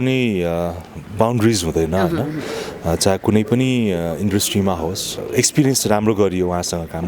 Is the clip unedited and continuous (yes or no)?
no